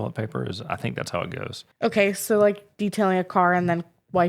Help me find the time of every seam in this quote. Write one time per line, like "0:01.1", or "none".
0:01.6